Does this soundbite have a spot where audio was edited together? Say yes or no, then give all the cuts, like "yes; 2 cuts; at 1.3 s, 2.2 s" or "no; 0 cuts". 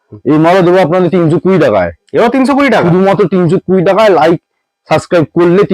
no; 0 cuts